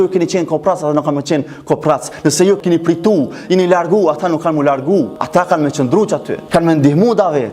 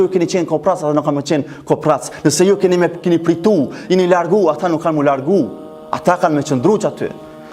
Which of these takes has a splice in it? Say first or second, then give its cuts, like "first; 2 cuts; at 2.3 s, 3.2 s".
first; 3 cuts; at 2.6 s, 5.2 s, 6.3 s